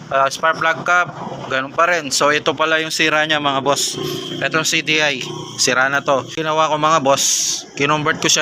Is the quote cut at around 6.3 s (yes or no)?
yes